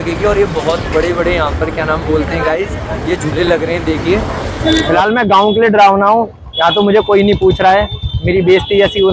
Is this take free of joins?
no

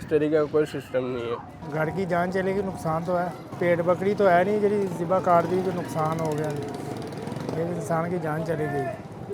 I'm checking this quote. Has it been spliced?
no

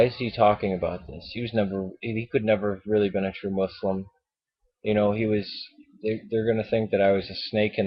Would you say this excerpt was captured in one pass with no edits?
no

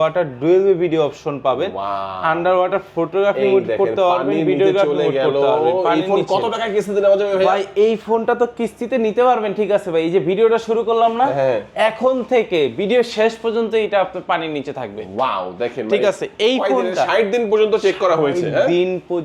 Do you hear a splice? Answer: no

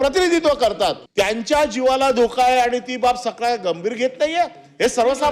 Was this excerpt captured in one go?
no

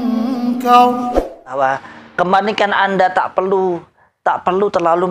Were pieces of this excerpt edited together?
yes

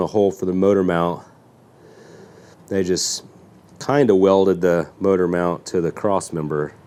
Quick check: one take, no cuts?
yes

